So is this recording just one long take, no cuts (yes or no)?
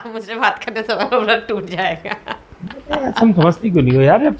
yes